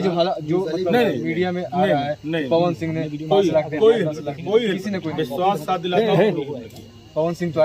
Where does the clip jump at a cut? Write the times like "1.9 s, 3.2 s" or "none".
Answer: none